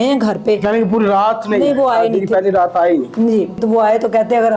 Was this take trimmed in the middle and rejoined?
yes; 1 cut; at 3.6 s

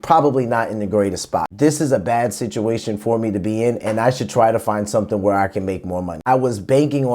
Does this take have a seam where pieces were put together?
yes; 2 cuts; at 1.5 s, 6.2 s

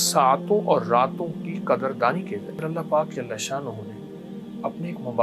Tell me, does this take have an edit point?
yes; 1 cut; at 2.4 s

